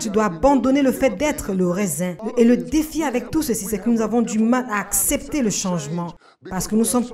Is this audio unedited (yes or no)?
no